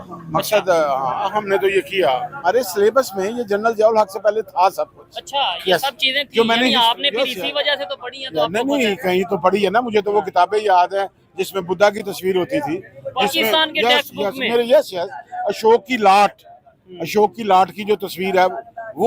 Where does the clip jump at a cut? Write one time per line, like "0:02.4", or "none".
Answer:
0:02.5